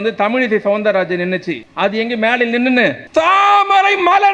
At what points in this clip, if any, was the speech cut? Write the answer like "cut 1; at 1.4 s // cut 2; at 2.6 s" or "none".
cut 1; at 1.6 s // cut 2; at 3.0 s